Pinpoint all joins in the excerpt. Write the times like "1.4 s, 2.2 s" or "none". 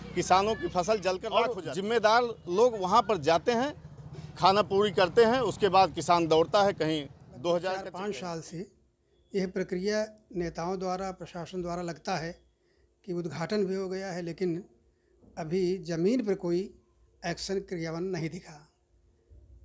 1.5 s, 7.9 s